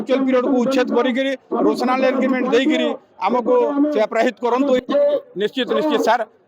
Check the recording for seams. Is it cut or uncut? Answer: cut